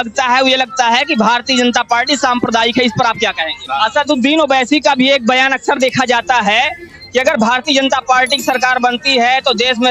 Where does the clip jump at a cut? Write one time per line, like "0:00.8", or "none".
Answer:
0:03.6